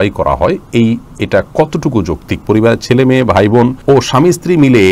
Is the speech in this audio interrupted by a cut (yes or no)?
yes